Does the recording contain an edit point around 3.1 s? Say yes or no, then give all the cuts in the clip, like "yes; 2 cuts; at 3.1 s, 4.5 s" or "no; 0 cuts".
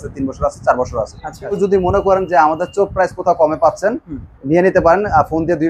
no; 1 cut; at 1.6 s